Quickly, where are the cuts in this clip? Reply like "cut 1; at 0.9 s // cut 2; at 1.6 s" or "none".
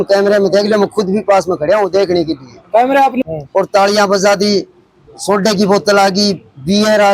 cut 1; at 3.2 s